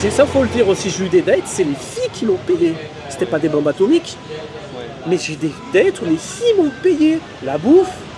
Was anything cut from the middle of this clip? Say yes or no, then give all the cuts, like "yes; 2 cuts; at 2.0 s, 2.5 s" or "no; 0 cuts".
no; 0 cuts